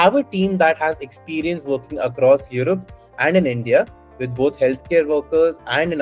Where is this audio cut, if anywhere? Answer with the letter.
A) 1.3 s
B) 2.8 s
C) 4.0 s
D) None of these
D